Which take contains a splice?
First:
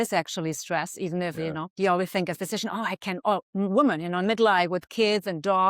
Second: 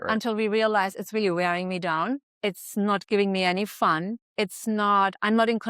second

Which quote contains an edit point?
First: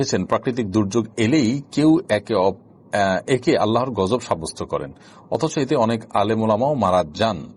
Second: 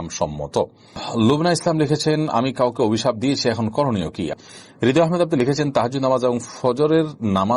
second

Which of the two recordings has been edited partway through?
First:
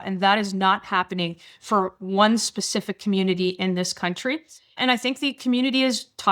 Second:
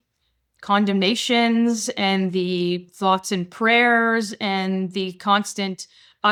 first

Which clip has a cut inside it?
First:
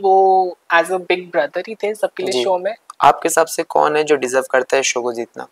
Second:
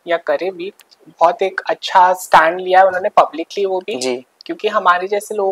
first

